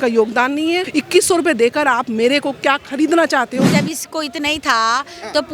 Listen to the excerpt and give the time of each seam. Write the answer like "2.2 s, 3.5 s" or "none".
0.9 s, 3.7 s